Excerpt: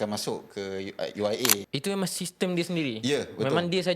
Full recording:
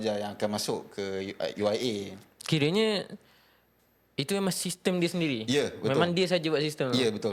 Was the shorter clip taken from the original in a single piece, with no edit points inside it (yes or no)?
no